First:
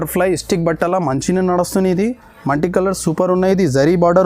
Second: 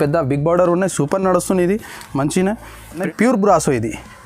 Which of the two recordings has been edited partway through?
second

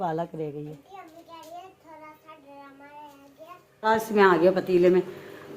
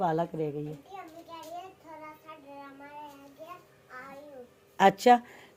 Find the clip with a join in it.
first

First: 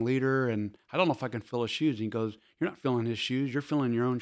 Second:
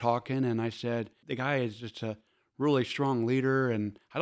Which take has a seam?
second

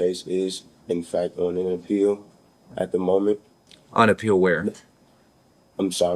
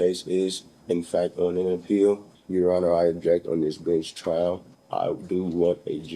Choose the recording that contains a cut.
second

